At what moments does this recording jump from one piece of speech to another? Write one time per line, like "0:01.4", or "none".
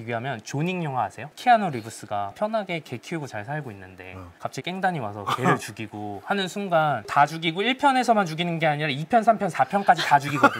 0:01.2
0:07.0

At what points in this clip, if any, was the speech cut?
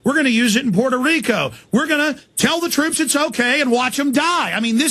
0:03.2

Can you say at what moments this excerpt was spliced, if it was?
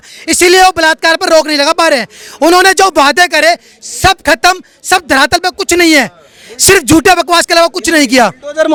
none

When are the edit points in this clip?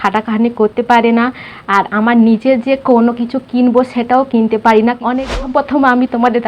0:05.3

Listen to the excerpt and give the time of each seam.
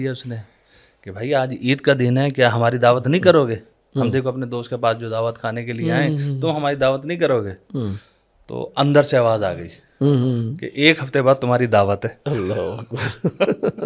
none

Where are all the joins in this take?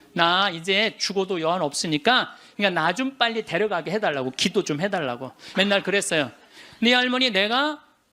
0:02.4
0:05.4

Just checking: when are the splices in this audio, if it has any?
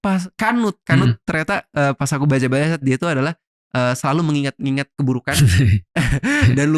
none

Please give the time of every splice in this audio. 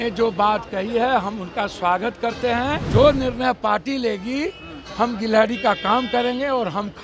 0:02.8

